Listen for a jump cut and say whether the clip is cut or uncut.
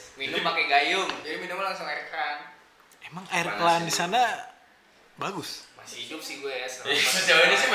cut